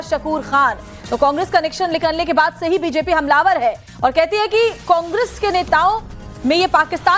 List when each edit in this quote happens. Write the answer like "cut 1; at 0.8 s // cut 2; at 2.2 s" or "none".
cut 1; at 5.7 s